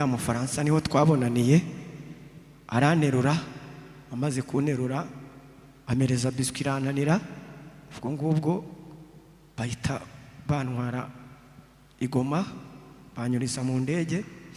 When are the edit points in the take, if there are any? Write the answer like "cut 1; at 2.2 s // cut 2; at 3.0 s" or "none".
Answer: none